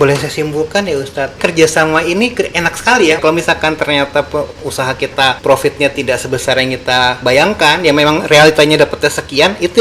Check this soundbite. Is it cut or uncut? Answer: cut